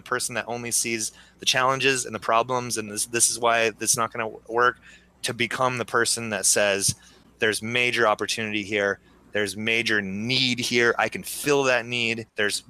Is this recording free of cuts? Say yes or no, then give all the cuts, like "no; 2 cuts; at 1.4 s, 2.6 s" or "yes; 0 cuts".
yes; 0 cuts